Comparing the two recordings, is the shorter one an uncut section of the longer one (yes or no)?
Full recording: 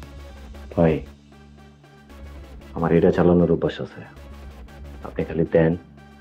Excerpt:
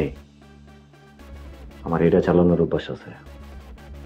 yes